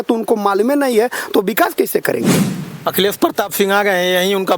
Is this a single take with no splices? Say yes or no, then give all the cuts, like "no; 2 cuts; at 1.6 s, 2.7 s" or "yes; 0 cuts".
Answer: no; 1 cut; at 2.6 s